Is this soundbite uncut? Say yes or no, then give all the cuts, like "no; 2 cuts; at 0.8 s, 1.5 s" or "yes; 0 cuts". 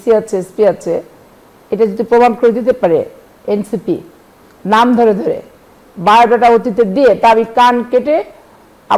yes; 0 cuts